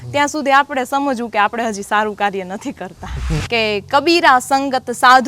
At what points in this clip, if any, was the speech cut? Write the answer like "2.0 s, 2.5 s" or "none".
3.3 s

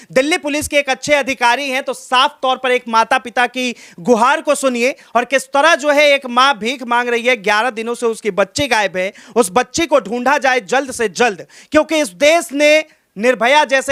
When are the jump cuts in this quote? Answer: none

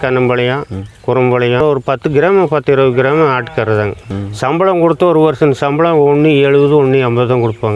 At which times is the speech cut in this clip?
1.6 s, 4.1 s

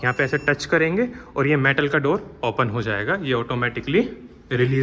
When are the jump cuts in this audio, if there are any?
none

